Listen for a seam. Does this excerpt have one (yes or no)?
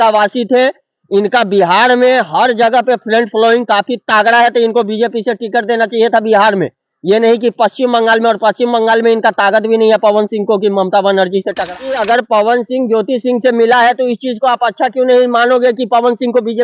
yes